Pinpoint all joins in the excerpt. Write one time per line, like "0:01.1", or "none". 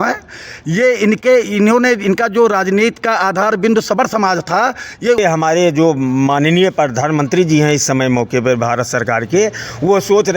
0:05.2